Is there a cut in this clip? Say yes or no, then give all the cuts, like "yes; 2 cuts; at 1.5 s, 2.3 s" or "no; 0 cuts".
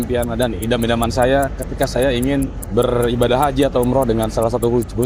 no; 0 cuts